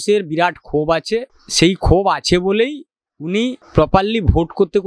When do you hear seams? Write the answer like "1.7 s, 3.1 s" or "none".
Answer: 1.4 s, 3.6 s

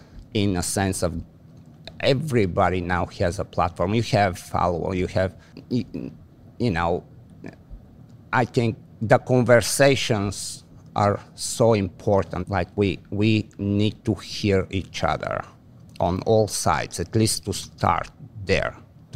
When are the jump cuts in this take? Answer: 12.4 s

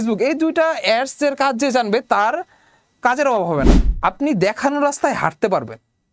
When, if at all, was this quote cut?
3.8 s

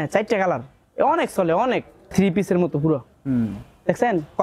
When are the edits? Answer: 2.1 s

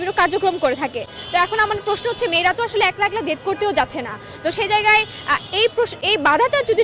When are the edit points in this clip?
none

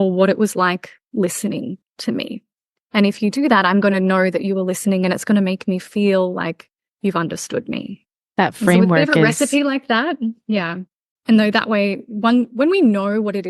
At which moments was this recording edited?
11.0 s

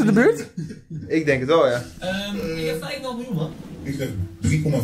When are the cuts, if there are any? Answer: none

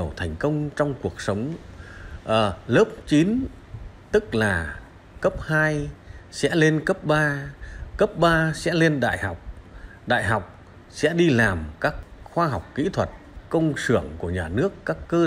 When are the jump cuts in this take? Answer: 12.0 s, 13.4 s

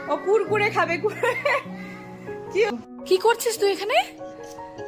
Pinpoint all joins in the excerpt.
2.7 s

